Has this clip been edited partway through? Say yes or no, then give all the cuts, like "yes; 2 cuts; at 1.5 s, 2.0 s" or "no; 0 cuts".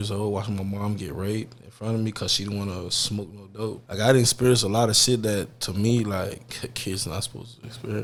no; 0 cuts